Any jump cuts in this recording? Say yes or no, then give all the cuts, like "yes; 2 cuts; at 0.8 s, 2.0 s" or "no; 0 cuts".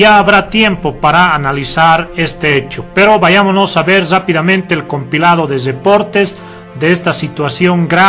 yes; 1 cut; at 3.6 s